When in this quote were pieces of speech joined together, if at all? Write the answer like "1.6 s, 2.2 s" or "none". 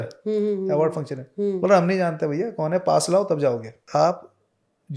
3.9 s